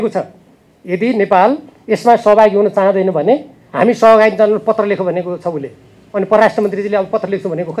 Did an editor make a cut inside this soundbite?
no; 0 cuts

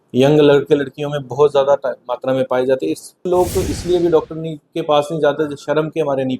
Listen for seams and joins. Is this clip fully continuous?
no; 1 cut; at 3.2 s

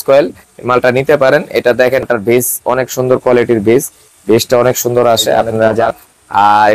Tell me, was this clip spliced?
yes; 2 cuts; at 2.0 s, 5.9 s

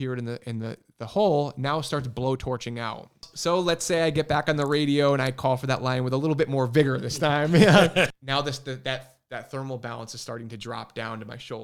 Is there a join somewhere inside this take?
yes; 2 cuts; at 3.3 s, 8.1 s

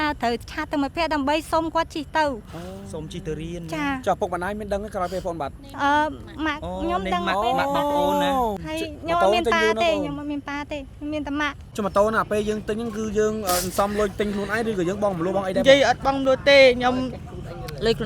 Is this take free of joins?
no; 2 cuts; at 8.6 s, 11.7 s

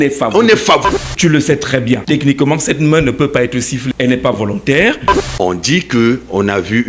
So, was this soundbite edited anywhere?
yes; 4 cuts; at 0.8 s, 2.0 s, 3.9 s, 5.1 s

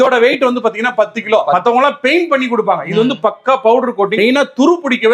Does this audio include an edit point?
yes; 2 cuts; at 1.5 s, 4.1 s

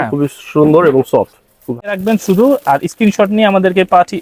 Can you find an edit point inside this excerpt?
yes; 1 cut; at 1.9 s

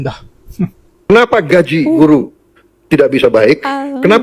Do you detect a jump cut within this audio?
no; 0 cuts

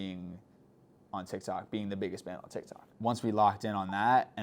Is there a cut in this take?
yes; 1 cut; at 2.8 s

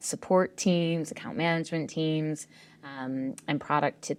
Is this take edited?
no; 0 cuts

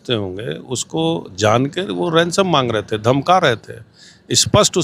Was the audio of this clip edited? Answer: no; 0 cuts

